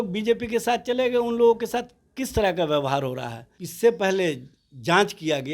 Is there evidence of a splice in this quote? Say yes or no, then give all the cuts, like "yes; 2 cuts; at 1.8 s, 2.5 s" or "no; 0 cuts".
yes; 1 cut; at 3.6 s